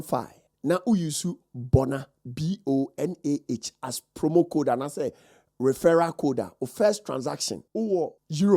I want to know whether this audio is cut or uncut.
uncut